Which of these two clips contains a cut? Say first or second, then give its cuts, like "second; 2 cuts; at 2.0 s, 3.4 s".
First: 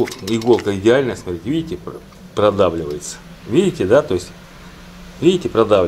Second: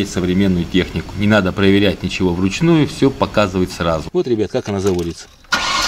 second; 1 cut; at 4.1 s